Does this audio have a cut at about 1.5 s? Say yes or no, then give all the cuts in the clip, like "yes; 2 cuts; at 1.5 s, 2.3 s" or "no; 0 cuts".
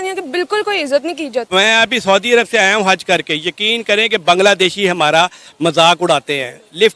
yes; 1 cut; at 1.5 s